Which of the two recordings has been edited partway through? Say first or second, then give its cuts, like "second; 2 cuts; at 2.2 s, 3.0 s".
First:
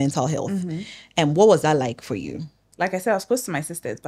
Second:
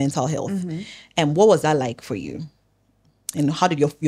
first; 1 cut; at 2.6 s